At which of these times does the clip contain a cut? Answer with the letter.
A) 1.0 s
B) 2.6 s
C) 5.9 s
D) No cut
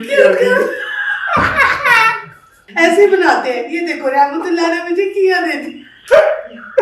B